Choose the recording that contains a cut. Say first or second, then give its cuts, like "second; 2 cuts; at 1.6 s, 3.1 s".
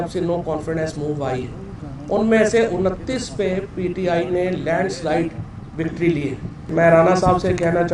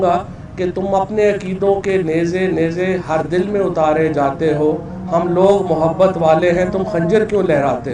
first; 1 cut; at 6.7 s